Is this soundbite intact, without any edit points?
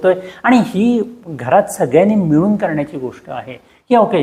yes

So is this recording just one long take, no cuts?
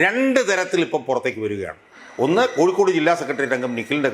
yes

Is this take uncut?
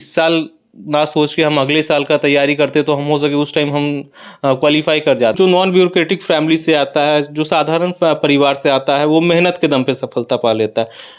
no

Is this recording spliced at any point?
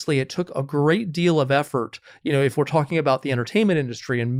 no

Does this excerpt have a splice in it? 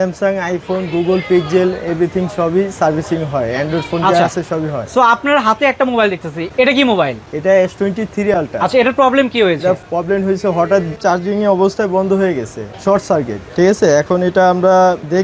no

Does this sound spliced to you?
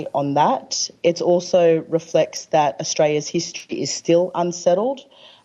no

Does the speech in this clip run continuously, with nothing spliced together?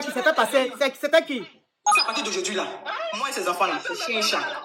no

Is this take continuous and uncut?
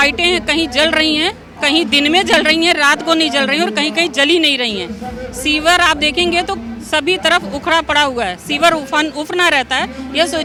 yes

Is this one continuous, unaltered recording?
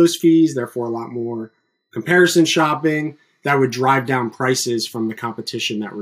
yes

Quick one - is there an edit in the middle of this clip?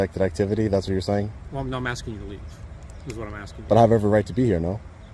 no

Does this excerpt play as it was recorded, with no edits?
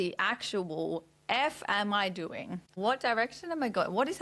no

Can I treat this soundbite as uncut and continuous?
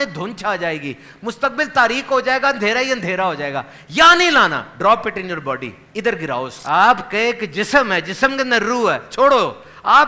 no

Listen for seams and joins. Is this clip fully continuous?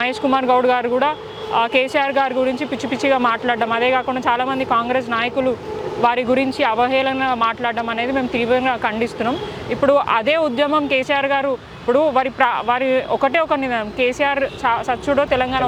yes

